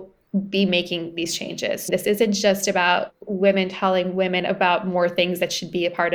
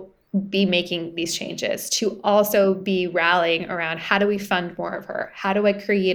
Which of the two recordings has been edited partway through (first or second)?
first